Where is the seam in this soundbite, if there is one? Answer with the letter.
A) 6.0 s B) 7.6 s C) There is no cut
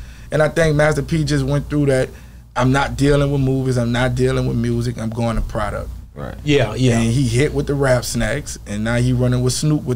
C